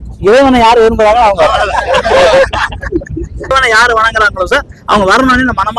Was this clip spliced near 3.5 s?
yes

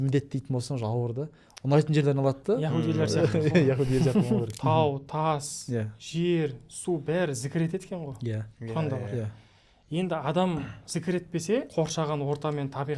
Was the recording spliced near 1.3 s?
no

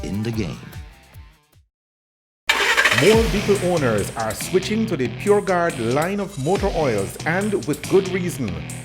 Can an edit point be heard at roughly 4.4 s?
no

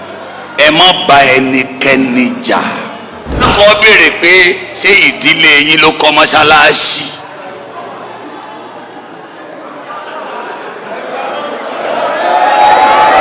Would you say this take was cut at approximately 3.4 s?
yes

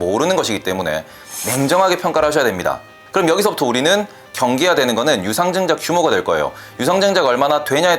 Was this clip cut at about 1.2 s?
yes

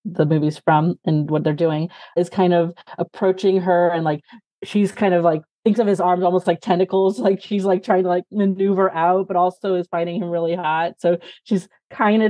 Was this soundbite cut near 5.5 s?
yes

